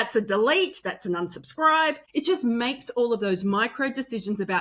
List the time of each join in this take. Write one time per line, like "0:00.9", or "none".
0:02.0